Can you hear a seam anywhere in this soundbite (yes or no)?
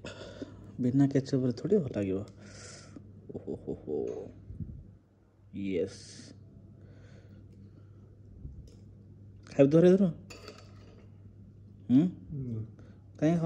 no